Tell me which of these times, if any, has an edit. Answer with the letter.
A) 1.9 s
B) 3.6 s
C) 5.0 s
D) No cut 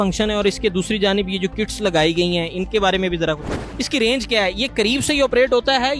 B